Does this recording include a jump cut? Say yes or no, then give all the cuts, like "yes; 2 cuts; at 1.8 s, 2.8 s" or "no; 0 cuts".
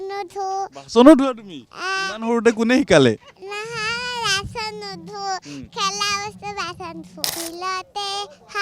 yes; 1 cut; at 7.3 s